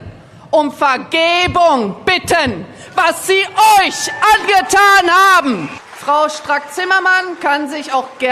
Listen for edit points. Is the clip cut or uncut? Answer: cut